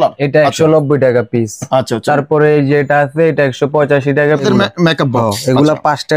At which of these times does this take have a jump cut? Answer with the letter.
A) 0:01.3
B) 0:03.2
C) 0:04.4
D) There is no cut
C